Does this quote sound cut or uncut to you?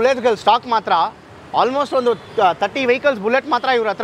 uncut